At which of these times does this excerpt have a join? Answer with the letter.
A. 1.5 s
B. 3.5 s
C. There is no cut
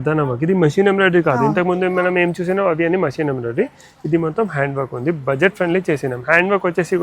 C